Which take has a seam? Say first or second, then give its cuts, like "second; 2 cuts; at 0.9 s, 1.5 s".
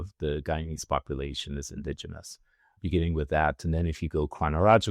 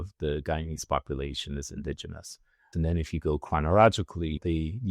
second; 1 cut; at 2.7 s